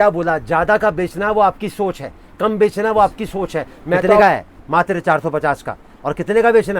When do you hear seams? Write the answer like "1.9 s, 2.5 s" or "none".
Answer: 4.2 s